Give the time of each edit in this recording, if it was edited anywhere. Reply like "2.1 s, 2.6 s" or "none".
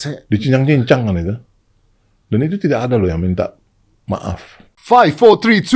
4.7 s